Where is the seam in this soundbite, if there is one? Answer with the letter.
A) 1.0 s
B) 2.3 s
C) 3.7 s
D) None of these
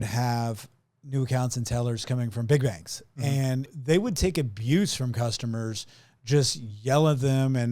C